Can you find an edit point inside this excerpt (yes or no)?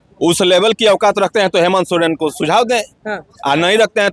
no